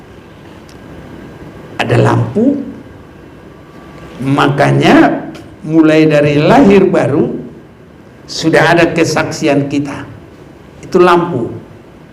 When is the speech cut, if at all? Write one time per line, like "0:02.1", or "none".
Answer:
none